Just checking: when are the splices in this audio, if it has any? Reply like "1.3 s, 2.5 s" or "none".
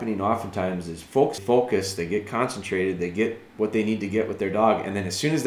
1.4 s